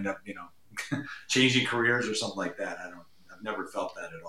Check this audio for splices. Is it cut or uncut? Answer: uncut